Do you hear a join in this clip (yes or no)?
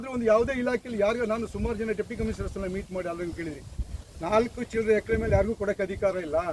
no